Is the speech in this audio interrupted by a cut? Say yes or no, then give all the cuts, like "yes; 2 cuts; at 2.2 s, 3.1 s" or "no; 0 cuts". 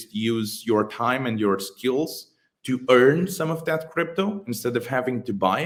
no; 0 cuts